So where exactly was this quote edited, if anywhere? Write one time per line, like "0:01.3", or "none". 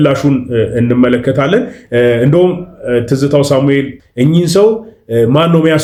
none